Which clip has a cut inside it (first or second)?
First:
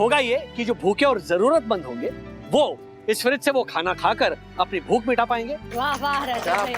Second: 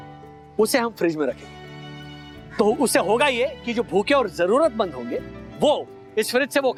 first